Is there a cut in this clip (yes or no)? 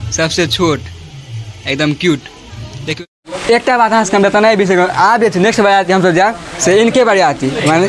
yes